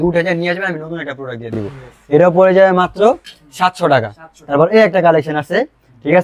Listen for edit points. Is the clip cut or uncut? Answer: uncut